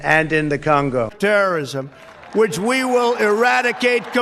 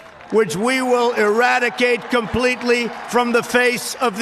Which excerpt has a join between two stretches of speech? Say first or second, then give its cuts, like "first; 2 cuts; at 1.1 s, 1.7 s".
first; 1 cut; at 1.1 s